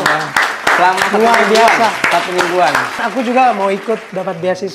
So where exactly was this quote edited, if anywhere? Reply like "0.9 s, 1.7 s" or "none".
3.0 s